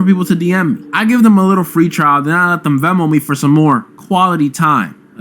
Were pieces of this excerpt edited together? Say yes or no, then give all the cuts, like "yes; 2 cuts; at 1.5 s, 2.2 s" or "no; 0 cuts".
yes; 1 cut; at 1.8 s